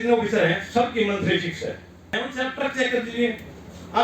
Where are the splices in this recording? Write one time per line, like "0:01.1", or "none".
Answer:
0:02.2